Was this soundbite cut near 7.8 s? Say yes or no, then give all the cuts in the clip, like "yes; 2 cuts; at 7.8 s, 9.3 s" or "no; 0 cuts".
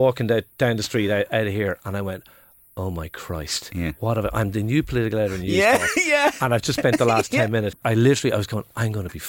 yes; 1 cut; at 7.8 s